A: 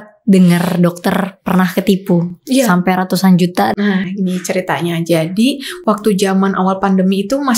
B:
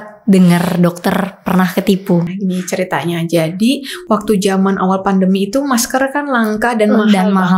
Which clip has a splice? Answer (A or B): B